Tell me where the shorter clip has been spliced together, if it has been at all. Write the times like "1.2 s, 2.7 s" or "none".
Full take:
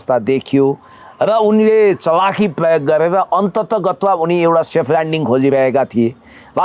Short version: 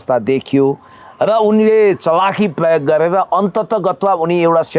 none